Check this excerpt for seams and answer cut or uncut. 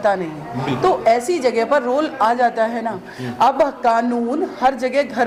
uncut